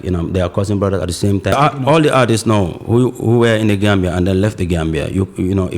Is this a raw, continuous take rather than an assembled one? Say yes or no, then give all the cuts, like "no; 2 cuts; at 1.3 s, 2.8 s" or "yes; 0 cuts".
no; 1 cut; at 1.5 s